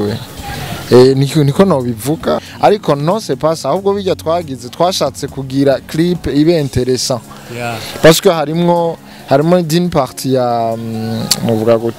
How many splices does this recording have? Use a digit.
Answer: 1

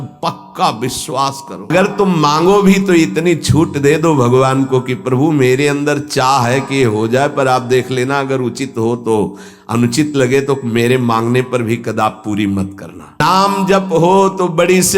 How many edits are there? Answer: 2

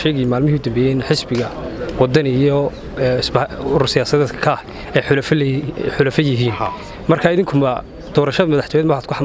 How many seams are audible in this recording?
0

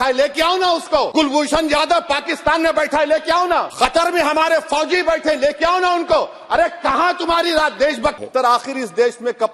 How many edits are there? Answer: 3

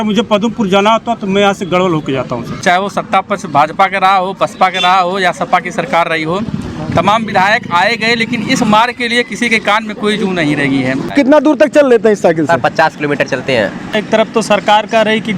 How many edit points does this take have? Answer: 3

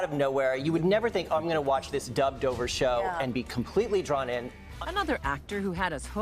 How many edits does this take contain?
1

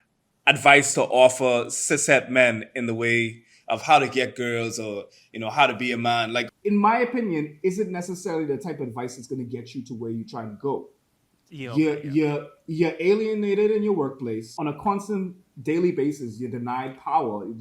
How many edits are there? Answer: 2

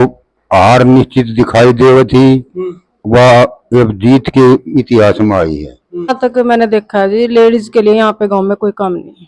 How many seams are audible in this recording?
1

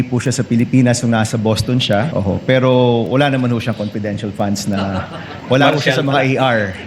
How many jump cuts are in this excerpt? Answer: 1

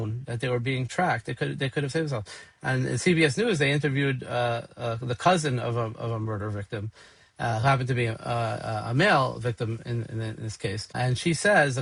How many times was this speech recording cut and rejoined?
0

